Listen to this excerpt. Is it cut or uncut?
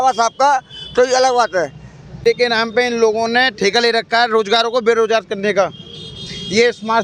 cut